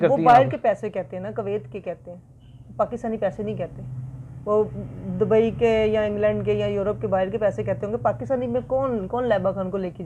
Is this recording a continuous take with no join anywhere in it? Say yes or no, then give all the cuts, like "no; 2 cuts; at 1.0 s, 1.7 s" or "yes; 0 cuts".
yes; 0 cuts